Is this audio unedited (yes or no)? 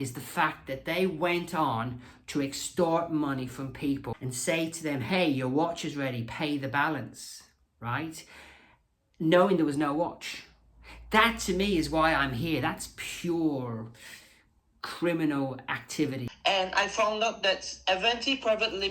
no